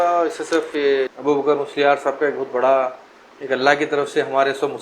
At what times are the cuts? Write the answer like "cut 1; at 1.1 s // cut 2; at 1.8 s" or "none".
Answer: cut 1; at 1.1 s